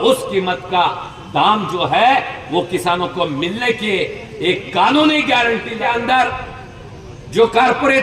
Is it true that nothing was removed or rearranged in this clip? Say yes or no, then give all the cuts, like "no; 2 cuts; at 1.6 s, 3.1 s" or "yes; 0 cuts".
no; 1 cut; at 5.8 s